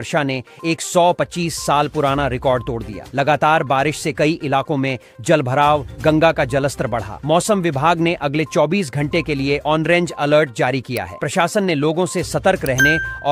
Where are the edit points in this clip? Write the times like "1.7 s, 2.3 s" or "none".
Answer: none